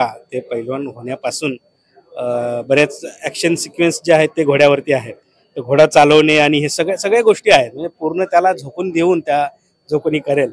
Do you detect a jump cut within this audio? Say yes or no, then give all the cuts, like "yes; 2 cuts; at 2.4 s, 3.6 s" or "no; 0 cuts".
no; 0 cuts